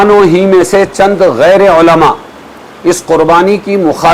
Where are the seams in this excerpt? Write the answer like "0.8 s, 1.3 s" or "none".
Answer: none